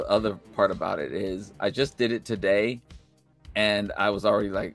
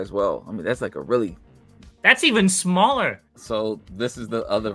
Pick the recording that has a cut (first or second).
second